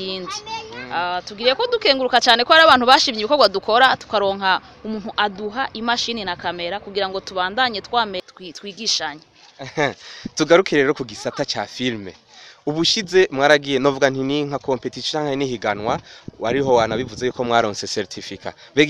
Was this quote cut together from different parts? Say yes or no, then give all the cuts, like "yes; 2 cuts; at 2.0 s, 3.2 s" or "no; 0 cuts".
yes; 1 cut; at 8.3 s